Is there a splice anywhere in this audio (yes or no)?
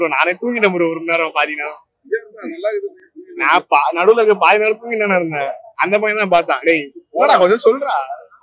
no